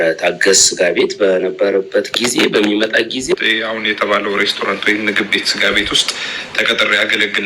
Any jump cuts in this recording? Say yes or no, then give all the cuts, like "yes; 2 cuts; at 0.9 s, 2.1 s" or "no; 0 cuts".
yes; 1 cut; at 3.3 s